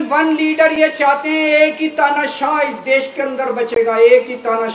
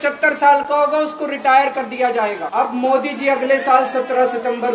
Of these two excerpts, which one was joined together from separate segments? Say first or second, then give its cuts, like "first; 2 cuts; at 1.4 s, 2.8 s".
second; 1 cut; at 2.4 s